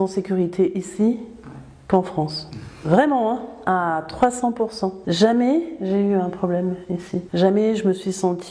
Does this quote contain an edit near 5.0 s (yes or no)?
yes